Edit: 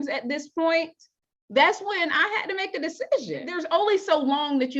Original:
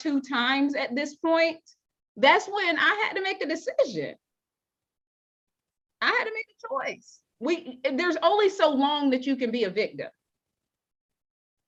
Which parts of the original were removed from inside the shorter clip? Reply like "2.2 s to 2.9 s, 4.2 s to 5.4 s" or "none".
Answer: 4.2 s to 8.0 s